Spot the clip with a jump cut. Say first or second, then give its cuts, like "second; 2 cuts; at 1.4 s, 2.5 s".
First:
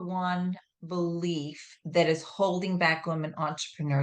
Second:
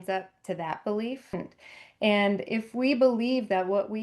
second; 1 cut; at 1.3 s